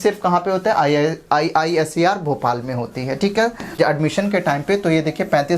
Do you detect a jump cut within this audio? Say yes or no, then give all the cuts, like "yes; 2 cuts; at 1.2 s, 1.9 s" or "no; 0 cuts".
yes; 1 cut; at 3.6 s